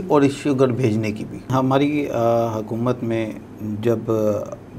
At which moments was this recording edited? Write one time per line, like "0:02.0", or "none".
0:01.5